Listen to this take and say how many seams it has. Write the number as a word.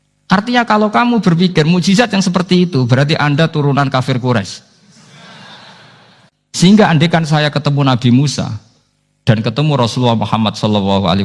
one